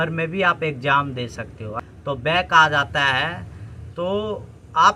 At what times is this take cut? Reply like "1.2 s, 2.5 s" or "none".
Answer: 1.7 s